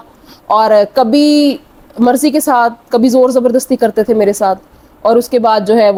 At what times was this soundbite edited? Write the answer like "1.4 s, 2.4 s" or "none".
none

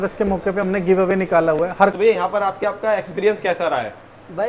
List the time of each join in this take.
1.9 s

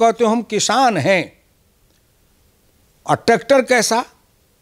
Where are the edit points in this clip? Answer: none

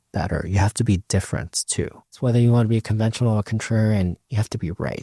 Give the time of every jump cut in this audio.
2.2 s

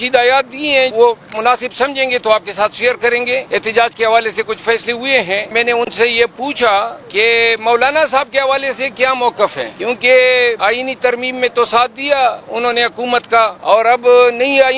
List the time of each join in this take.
0.9 s, 3.4 s, 5.5 s, 7.0 s, 9.7 s, 10.6 s, 13.6 s

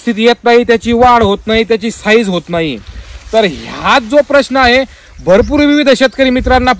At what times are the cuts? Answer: none

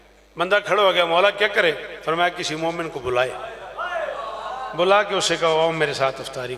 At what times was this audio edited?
none

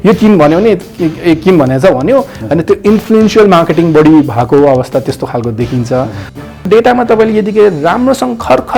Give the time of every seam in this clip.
6.3 s

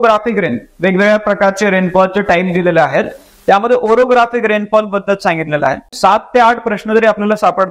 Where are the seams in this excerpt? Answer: 5.9 s

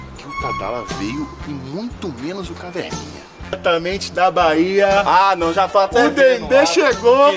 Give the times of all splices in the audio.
3.6 s

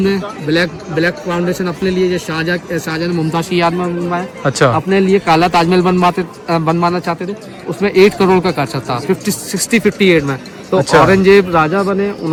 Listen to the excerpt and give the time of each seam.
none

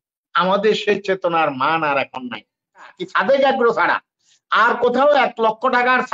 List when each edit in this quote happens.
2.9 s

